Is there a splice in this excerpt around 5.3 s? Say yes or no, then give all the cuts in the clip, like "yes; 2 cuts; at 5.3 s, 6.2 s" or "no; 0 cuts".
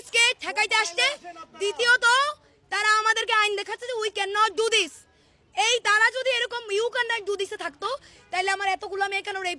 no; 0 cuts